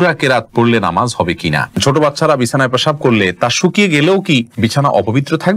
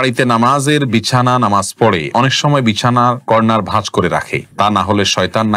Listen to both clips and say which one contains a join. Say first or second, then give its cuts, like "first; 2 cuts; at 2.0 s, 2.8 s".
first; 2 cuts; at 1.8 s, 4.5 s